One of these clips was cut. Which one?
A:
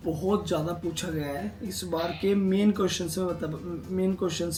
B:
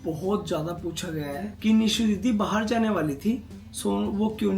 B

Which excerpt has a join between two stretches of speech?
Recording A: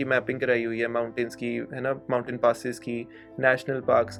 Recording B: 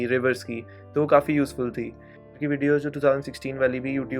B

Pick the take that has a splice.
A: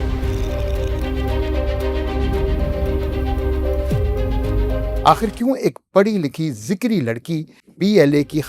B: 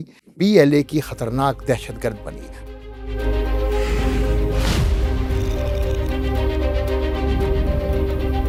A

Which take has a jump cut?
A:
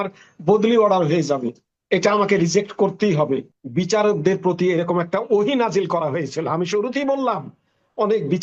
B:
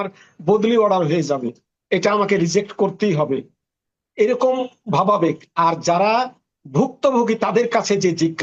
A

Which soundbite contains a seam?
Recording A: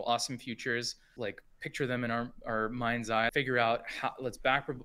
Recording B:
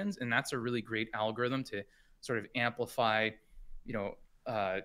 A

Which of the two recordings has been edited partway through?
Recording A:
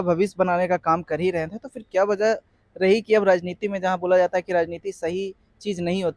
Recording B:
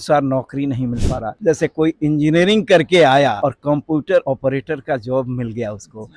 B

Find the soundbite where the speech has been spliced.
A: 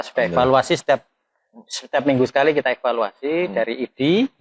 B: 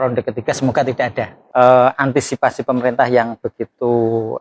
B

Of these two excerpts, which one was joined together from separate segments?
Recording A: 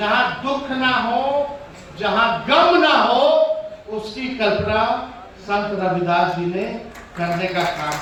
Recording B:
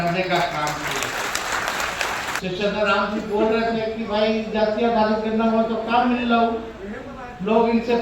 B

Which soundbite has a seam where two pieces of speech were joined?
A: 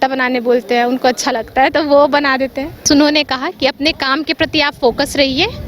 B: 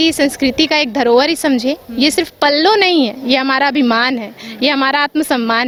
A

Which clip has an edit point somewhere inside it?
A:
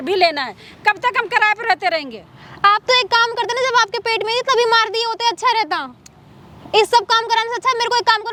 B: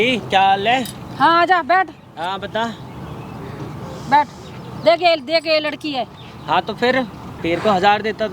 B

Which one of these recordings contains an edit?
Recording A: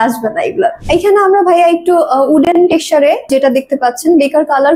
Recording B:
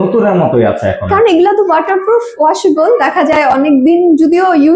A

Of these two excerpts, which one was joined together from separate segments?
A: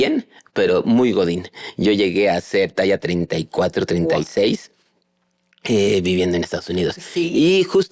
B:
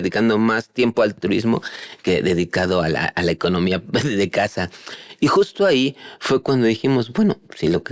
B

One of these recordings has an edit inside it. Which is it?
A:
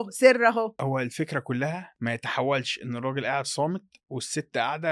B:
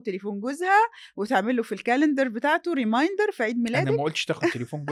A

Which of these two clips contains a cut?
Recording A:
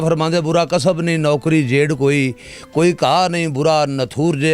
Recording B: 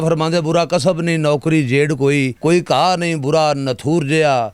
B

